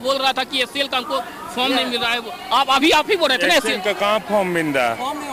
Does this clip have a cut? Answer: no; 0 cuts

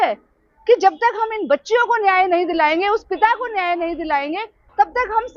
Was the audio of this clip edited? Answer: no; 0 cuts

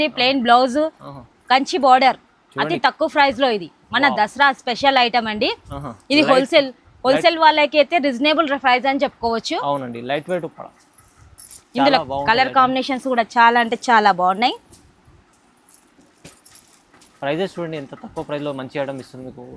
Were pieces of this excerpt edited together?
no; 0 cuts

